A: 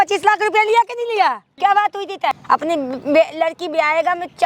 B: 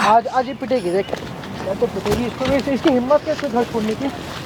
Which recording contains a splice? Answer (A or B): A